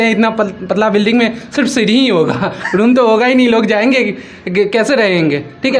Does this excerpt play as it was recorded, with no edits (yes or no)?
yes